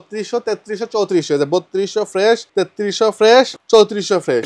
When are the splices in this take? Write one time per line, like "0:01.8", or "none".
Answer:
0:02.5
0:03.6